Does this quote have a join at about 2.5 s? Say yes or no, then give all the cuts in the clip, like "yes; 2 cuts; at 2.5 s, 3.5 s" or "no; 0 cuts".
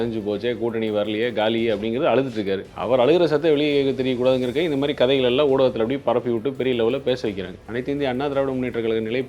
no; 1 cut; at 7.5 s